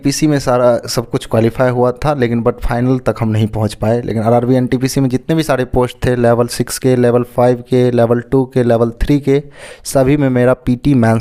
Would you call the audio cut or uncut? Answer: uncut